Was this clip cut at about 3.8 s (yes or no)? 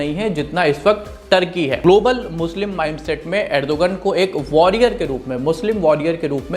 no